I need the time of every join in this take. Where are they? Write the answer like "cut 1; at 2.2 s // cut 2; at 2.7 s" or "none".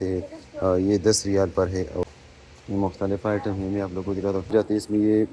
cut 1; at 2.1 s // cut 2; at 4.5 s